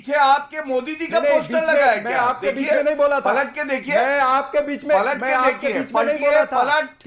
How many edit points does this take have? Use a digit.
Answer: 0